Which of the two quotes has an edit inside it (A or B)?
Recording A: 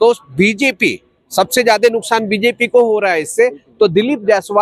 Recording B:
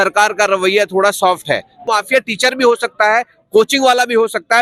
B